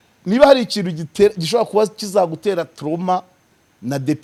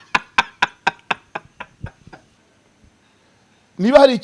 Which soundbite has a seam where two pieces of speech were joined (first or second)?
second